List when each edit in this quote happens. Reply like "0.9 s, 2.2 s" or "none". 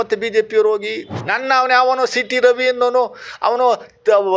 1.1 s